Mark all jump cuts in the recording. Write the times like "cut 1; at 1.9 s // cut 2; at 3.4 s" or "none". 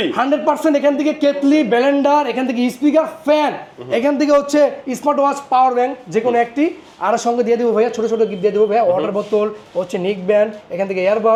none